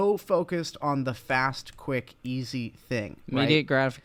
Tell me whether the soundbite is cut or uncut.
uncut